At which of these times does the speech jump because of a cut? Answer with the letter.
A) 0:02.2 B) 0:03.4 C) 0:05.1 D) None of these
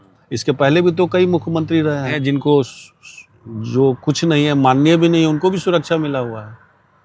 A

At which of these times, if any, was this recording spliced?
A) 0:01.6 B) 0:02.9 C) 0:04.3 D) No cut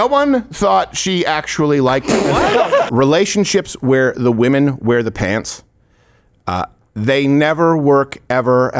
B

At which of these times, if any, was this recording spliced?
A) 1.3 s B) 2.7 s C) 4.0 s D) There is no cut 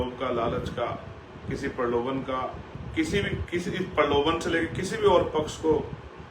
B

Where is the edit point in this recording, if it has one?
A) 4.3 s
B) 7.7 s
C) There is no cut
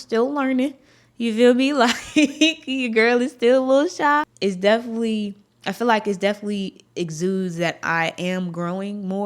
A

